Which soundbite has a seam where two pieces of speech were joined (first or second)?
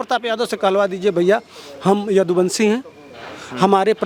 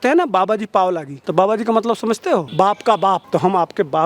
second